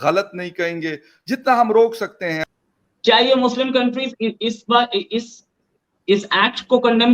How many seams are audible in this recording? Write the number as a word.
one